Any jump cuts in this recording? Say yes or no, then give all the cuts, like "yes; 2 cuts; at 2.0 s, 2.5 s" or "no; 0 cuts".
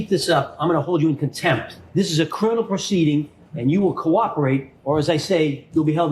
no; 0 cuts